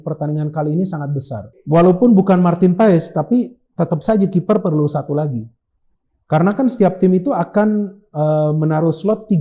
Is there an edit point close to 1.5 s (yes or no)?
yes